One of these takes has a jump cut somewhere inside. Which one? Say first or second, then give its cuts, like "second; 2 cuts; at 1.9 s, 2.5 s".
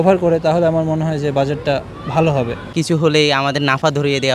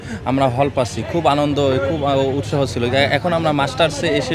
first; 1 cut; at 2.7 s